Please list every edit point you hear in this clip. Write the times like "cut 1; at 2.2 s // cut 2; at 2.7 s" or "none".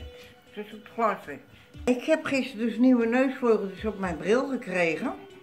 cut 1; at 1.9 s